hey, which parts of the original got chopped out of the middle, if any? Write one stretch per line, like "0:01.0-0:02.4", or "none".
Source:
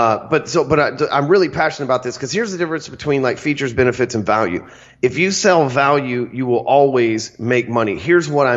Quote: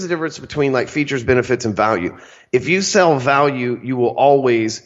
none